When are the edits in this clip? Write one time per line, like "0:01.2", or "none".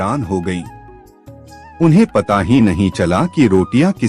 none